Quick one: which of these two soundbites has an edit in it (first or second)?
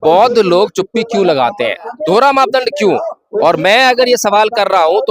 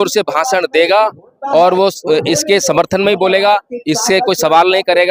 first